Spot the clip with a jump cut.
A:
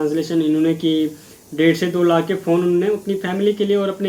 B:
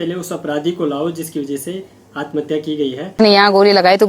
B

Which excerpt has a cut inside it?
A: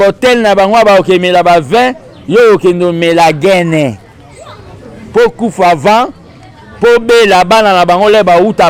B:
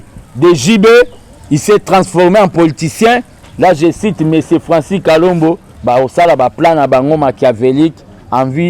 B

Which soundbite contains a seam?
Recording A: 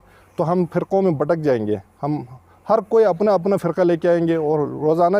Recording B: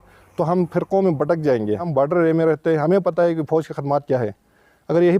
B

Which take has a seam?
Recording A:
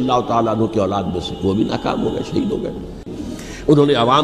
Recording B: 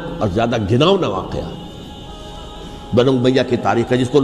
A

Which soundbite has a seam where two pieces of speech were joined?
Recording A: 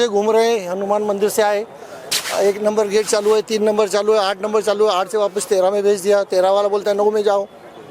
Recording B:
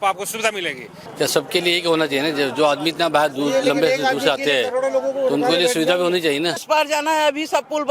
B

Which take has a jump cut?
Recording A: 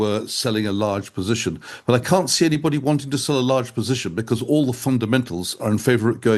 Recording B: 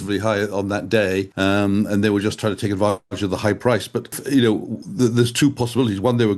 B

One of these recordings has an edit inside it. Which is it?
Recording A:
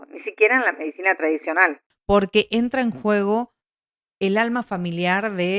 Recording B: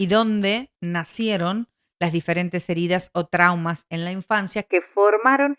A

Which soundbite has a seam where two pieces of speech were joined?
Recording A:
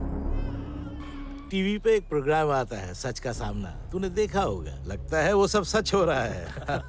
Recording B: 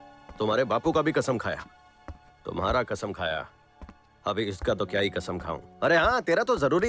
A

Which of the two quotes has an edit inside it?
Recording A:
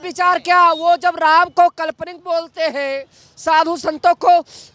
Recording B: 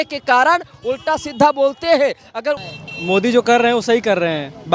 B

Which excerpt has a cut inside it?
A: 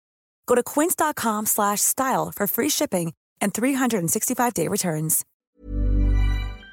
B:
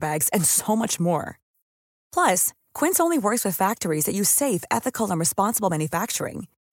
A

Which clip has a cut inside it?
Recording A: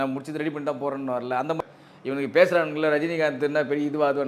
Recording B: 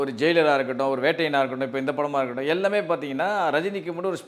A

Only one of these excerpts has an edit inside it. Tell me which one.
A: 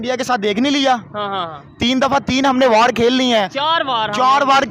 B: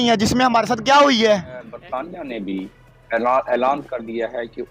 B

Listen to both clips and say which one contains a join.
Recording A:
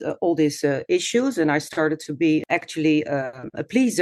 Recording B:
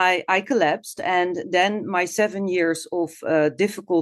A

